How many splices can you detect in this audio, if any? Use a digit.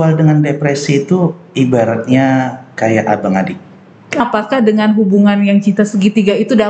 1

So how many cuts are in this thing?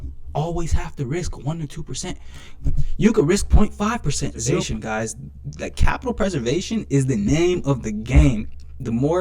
1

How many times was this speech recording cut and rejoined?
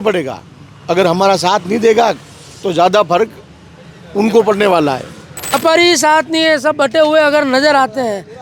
1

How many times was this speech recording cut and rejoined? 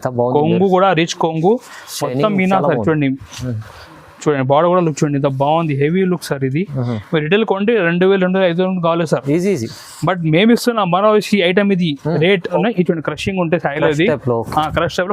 1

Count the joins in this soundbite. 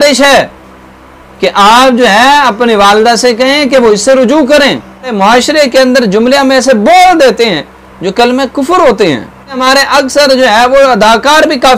2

